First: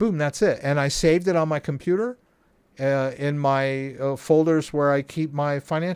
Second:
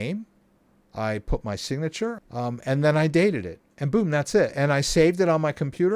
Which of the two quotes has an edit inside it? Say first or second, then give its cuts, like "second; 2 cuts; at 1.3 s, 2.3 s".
second; 1 cut; at 2.2 s